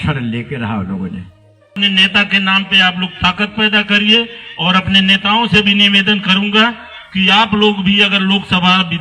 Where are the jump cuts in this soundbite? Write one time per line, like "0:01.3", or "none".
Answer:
0:01.7